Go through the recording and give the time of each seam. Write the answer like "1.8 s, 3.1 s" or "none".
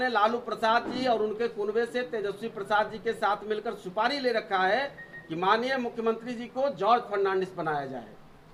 none